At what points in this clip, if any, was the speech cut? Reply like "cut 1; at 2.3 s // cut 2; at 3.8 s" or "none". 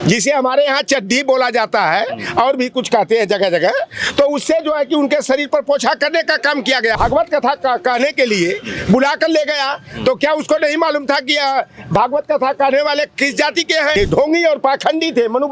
cut 1; at 7.0 s // cut 2; at 13.9 s

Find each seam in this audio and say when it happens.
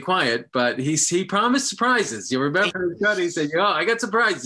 cut 1; at 2.7 s

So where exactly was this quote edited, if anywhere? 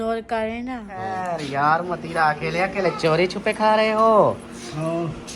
cut 1; at 1.1 s

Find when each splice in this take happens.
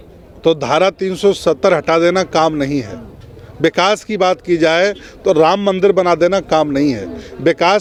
none

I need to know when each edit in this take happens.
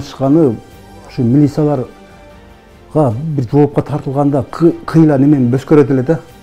none

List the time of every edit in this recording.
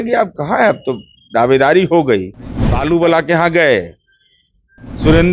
cut 1; at 2.7 s

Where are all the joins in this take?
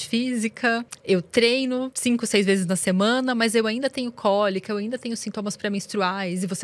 cut 1; at 0.9 s // cut 2; at 1.9 s

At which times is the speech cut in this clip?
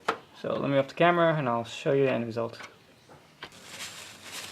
cut 1; at 3.5 s

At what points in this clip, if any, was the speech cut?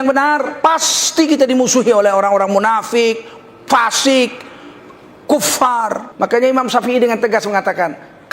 cut 1; at 6.0 s

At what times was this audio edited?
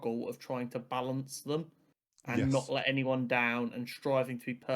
none

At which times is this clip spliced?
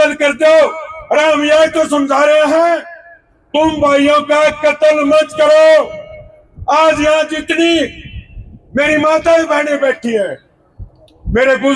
none

